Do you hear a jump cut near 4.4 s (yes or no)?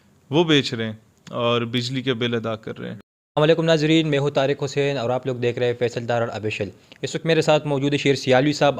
no